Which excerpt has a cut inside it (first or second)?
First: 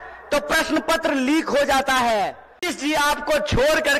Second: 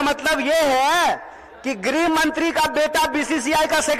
first